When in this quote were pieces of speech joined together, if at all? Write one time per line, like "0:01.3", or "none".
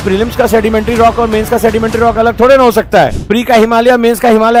none